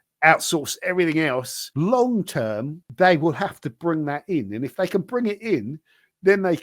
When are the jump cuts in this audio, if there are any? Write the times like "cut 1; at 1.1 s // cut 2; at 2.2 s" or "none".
cut 1; at 1.6 s // cut 2; at 2.8 s